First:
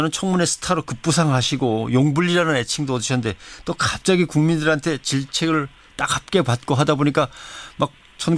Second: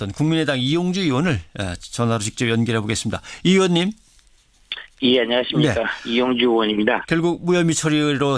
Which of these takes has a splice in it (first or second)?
first